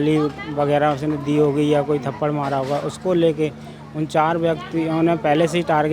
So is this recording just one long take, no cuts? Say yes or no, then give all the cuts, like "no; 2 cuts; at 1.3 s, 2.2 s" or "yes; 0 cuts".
yes; 0 cuts